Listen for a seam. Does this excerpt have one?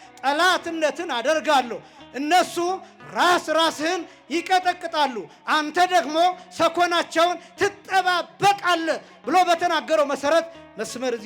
no; 0 cuts

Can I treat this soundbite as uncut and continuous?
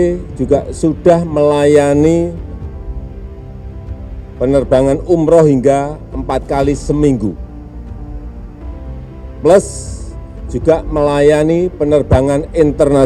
no; 2 cuts; at 2.4 s, 3.9 s

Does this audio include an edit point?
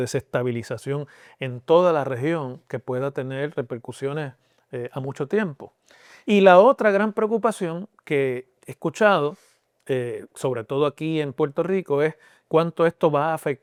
no; 0 cuts

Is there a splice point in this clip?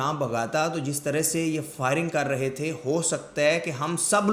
no; 0 cuts

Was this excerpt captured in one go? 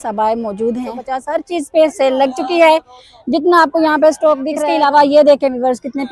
no; 2 cuts; at 1.1 s, 4.5 s

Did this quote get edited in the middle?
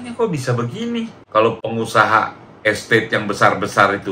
yes; 1 cut; at 1.2 s

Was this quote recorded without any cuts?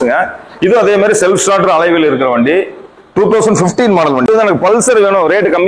no; 1 cut; at 4.2 s

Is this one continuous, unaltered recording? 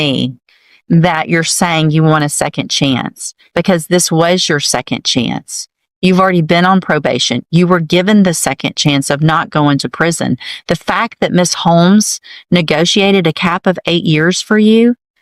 yes; 0 cuts

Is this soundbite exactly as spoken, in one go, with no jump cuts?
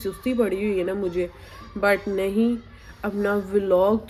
yes; 0 cuts

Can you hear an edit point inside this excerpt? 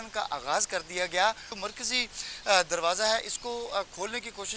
yes; 1 cut; at 1.5 s

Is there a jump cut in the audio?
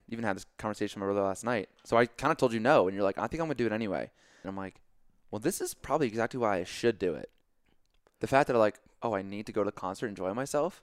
yes; 1 cut; at 4.5 s

